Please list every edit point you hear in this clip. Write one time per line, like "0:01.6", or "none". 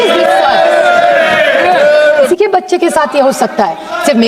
0:02.3